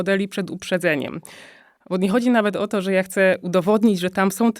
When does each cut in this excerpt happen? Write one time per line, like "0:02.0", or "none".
none